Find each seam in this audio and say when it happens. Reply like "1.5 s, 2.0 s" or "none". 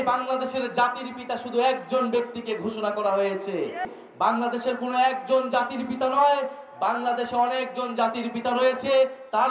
3.8 s